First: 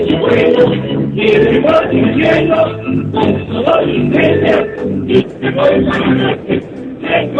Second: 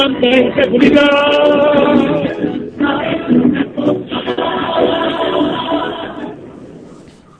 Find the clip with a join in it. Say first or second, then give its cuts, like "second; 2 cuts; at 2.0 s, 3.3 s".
second; 1 cut; at 2.3 s